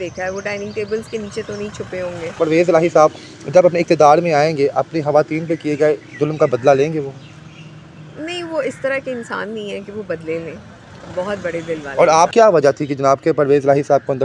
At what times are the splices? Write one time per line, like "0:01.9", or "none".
0:02.4
0:12.3